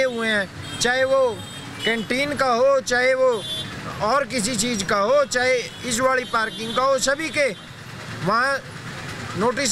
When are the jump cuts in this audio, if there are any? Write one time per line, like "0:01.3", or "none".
none